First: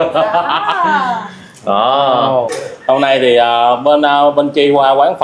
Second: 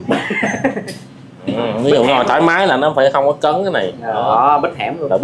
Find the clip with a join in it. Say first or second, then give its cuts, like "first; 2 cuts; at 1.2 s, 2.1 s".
first; 1 cut; at 2.5 s